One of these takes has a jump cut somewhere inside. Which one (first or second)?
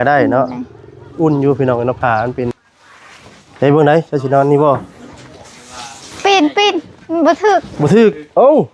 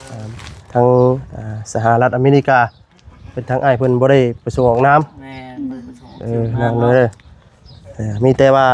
first